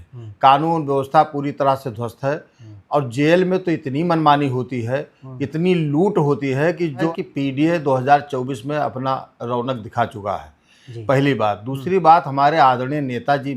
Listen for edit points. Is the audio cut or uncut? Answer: cut